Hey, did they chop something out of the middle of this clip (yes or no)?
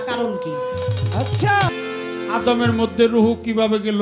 yes